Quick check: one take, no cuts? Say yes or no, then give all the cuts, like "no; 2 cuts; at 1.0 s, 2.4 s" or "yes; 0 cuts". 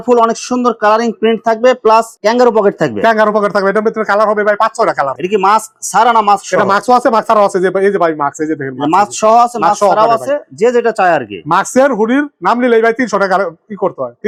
yes; 0 cuts